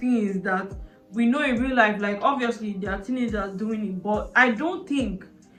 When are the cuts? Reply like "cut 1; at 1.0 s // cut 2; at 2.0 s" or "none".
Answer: none